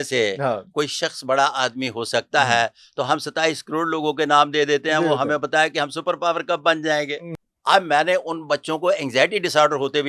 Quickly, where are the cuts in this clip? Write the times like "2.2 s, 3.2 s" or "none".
7.2 s